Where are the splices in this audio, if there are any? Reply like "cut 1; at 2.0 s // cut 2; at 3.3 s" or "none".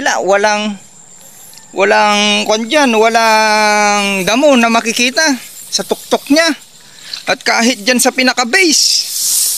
none